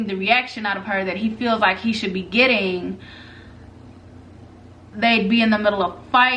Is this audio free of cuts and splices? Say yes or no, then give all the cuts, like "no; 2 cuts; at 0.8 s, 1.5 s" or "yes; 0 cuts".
yes; 0 cuts